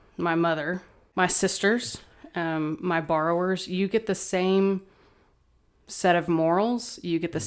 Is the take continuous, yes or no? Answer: no